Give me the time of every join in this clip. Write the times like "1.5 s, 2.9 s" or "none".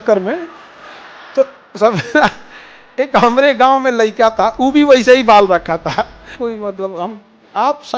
6.3 s